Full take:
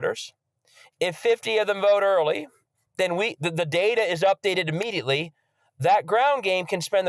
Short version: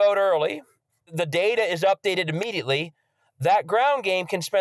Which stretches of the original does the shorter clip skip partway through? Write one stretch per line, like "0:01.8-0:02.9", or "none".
0:02.9-0:03.4

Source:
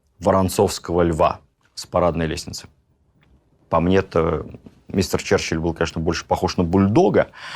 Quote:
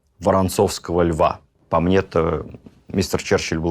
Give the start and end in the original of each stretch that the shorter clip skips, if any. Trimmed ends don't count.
0:01.5-0:03.5

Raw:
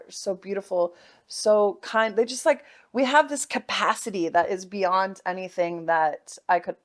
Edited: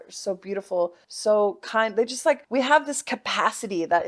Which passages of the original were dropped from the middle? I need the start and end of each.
0:01.1-0:01.3
0:02.6-0:02.9

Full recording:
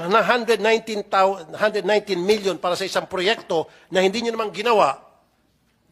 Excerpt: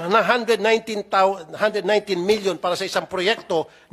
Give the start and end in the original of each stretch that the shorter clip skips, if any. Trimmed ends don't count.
none

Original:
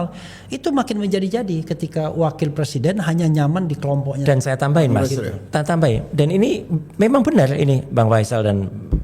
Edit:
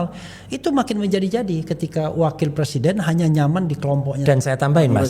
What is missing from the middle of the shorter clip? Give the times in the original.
none

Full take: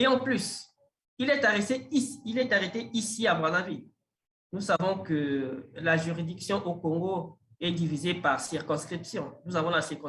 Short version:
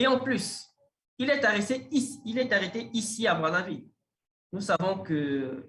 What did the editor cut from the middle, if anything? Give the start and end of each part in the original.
none

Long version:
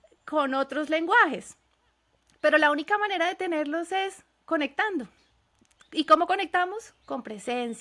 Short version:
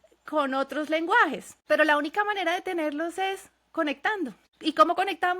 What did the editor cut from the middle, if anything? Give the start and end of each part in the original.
0:01.5-0:02.2
0:05.2-0:05.8

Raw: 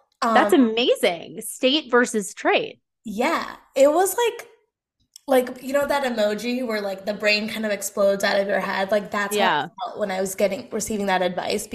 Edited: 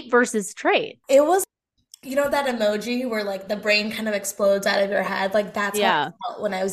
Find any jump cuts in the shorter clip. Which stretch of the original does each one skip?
0:02.7-0:03.6
0:04.7-0:05.6

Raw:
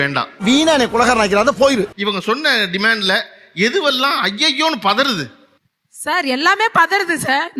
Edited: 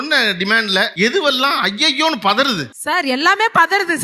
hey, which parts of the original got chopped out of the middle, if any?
0:03.2-0:03.5
0:05.3-0:05.9

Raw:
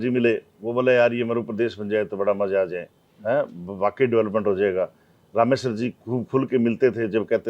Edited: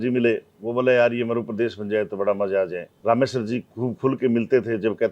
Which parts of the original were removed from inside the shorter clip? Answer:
0:02.9-0:05.2

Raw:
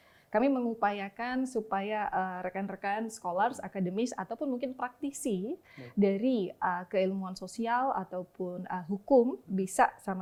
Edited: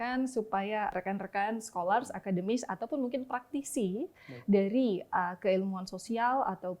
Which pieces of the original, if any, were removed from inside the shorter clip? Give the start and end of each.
0:02.1-0:02.4

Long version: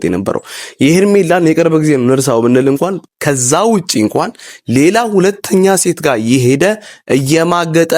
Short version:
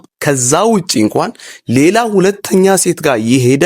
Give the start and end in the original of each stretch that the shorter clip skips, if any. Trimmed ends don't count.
none

